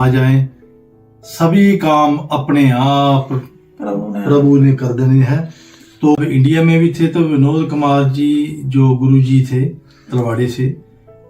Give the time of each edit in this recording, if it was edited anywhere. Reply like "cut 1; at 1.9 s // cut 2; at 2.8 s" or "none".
cut 1; at 6.2 s